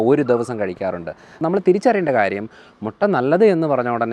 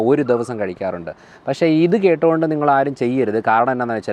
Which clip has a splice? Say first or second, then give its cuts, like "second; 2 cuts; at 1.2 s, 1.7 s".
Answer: first; 1 cut; at 1.3 s